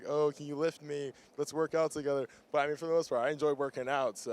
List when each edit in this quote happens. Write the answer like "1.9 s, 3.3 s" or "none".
none